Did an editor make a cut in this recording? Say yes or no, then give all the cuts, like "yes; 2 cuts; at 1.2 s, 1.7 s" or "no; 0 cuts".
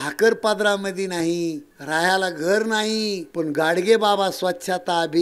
yes; 2 cuts; at 1.7 s, 3.2 s